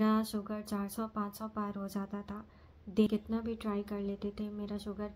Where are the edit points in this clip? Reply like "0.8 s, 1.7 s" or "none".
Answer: 3.1 s

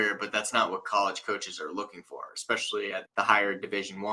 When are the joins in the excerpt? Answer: 3.1 s

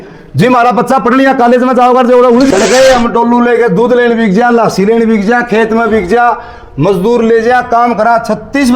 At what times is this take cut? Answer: 2.5 s

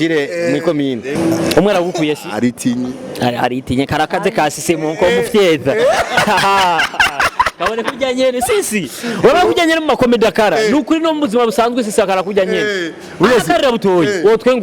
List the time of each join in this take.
1.1 s

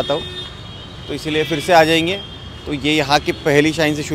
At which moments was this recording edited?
none

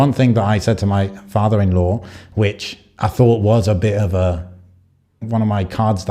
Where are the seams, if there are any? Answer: 5.2 s

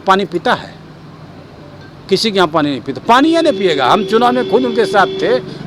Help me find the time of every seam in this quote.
none

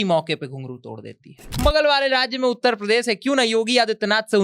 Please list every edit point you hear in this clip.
1.4 s

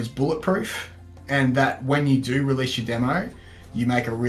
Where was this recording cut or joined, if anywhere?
none

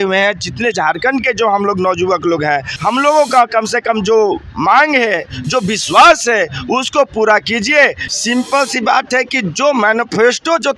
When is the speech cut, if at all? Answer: 2.7 s, 8.0 s

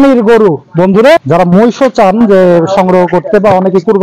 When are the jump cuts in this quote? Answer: 1.2 s

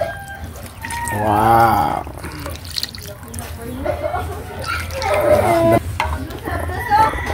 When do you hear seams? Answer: 5.8 s

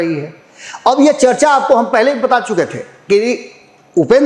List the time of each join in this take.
none

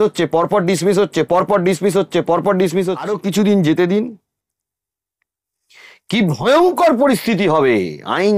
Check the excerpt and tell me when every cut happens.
3.1 s

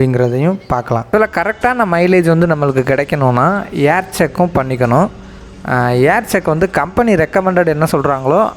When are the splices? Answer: 1.1 s

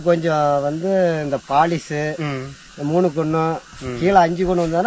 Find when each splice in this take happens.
none

